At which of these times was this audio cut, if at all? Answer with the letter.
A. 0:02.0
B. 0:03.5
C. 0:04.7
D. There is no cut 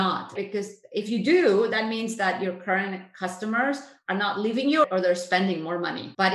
D